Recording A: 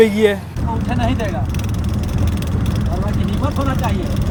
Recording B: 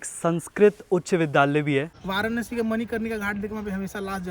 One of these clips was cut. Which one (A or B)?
B